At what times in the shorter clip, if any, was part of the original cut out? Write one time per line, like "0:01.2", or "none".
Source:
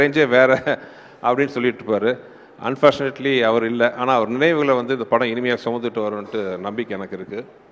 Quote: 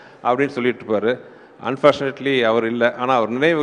none